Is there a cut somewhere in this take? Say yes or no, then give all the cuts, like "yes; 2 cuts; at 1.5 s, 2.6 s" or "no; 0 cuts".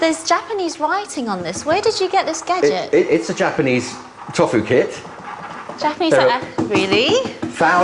yes; 1 cut; at 2.0 s